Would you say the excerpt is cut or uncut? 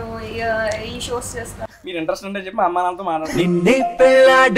cut